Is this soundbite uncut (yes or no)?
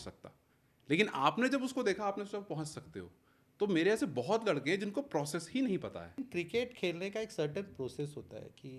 no